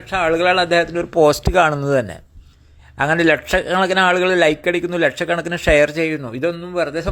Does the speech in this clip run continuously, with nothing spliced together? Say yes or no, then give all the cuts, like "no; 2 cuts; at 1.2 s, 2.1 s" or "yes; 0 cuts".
yes; 0 cuts